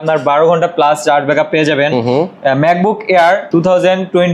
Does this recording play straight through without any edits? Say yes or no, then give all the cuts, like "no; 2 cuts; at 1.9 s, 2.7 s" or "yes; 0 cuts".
yes; 0 cuts